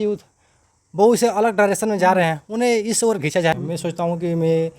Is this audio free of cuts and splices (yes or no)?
no